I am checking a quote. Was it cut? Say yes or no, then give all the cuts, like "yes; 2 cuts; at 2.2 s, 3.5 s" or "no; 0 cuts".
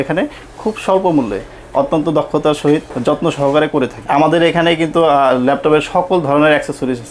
yes; 2 cuts; at 2.9 s, 4.0 s